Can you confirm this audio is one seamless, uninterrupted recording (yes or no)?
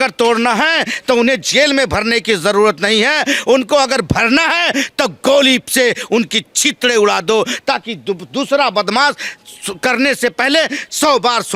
yes